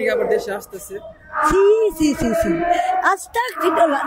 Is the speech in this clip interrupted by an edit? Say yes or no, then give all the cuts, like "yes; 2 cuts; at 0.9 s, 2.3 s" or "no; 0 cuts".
no; 0 cuts